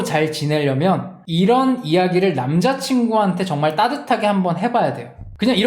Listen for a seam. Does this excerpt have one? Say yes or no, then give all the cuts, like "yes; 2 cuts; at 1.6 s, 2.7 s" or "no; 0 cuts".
no; 0 cuts